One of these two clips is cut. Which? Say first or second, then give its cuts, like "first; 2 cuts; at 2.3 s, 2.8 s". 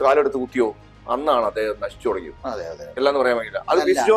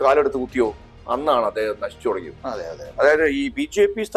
second; 1 cut; at 2.9 s